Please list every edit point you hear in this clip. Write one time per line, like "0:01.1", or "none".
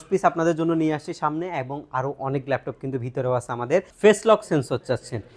0:03.9